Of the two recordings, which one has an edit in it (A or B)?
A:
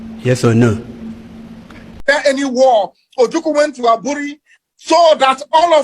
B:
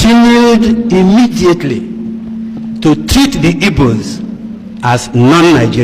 A